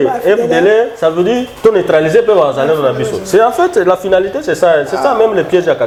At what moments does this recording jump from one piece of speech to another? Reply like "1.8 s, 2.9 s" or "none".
none